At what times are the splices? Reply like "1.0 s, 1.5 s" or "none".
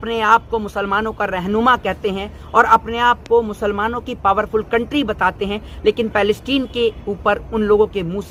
none